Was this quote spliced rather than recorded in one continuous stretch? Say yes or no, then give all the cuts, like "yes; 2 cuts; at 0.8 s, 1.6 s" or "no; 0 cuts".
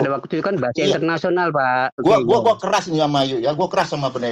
yes; 1 cut; at 2.0 s